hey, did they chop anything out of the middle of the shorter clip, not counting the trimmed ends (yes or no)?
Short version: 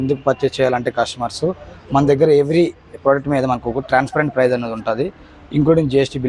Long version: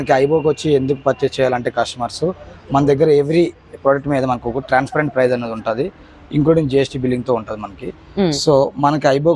no